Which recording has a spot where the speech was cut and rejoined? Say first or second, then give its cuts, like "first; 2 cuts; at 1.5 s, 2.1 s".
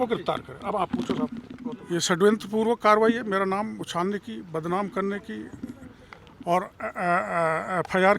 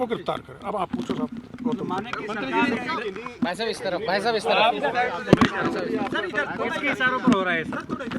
first; 1 cut; at 1.5 s